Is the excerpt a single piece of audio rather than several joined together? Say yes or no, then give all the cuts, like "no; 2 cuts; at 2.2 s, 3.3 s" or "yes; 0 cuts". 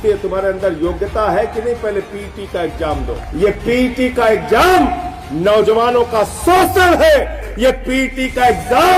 no; 2 cuts; at 3.2 s, 7.4 s